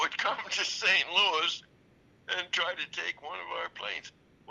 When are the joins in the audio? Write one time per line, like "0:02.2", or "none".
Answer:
none